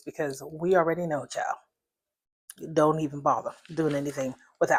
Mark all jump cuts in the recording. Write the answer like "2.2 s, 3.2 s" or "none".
none